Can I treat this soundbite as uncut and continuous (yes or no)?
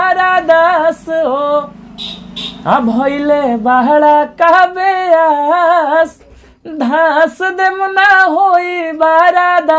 yes